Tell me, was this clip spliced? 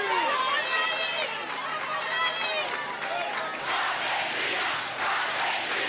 yes; 1 cut; at 3.6 s

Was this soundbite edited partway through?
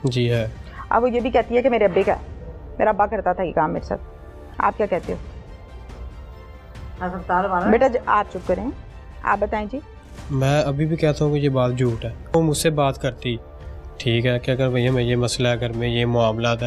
no; 0 cuts

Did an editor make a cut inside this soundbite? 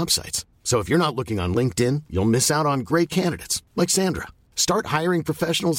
no; 0 cuts

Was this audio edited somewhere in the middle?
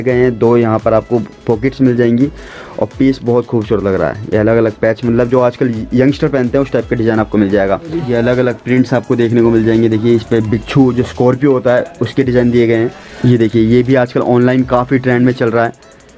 yes; 2 cuts; at 8.0 s, 13.0 s

